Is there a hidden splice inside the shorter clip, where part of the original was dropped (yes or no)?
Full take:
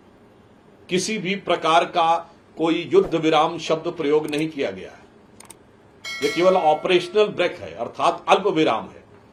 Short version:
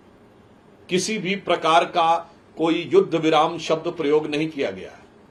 no